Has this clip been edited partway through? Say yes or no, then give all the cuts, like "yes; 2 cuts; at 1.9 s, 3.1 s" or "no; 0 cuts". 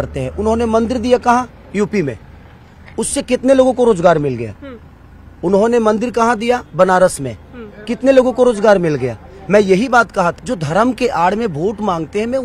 yes; 1 cut; at 10.4 s